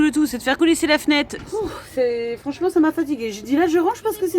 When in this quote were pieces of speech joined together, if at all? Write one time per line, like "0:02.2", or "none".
0:01.7